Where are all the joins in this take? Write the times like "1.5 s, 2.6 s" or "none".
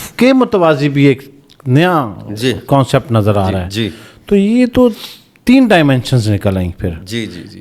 none